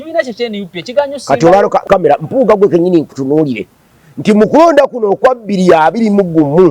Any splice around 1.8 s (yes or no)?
yes